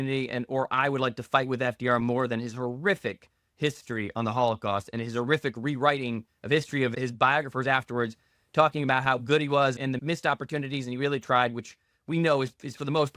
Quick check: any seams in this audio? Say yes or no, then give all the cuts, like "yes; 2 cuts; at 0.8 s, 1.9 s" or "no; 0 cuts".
yes; 2 cuts; at 6.9 s, 10.0 s